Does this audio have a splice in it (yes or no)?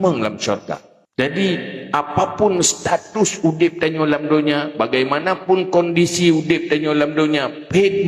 yes